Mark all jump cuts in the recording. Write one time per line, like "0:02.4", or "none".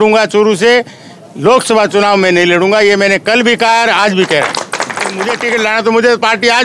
0:05.4